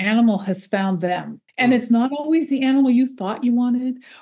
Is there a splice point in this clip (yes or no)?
yes